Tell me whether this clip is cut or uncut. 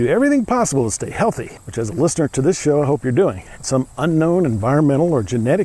cut